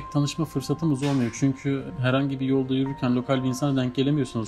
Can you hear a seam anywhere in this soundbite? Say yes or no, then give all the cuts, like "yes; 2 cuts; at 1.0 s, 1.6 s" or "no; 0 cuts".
yes; 1 cut; at 1.9 s